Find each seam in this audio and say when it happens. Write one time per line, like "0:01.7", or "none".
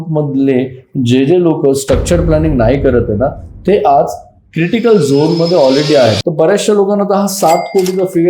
0:06.2